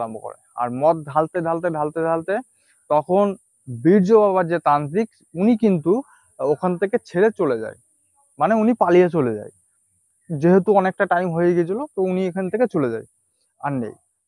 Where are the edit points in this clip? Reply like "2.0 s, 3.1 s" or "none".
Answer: none